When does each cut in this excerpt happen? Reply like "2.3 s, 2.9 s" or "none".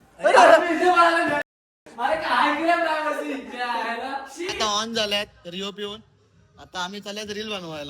4.6 s